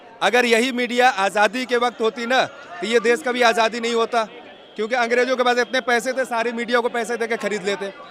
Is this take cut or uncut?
uncut